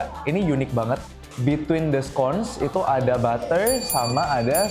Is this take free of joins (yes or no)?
no